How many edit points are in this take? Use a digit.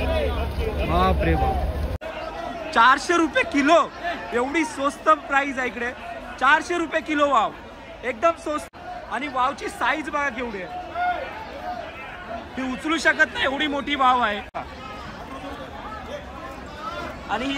3